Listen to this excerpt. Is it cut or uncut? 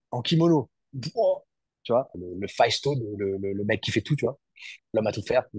cut